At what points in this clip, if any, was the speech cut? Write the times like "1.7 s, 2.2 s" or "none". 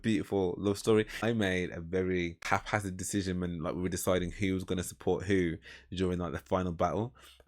1.2 s, 2.4 s